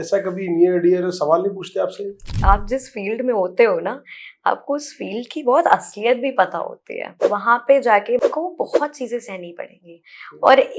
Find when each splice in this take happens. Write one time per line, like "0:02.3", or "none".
0:02.3
0:07.1
0:08.3